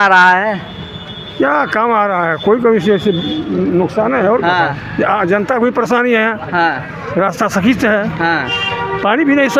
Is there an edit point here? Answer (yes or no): no